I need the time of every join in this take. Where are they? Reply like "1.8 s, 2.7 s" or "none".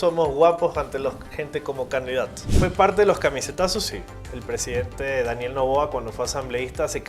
2.6 s